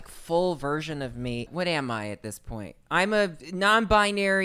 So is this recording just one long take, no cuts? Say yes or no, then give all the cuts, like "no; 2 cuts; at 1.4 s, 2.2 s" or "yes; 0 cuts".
no; 2 cuts; at 1.4 s, 3.4 s